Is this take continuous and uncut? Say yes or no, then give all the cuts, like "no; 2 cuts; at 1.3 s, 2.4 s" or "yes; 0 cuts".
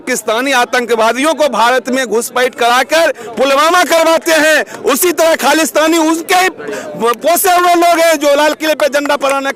yes; 0 cuts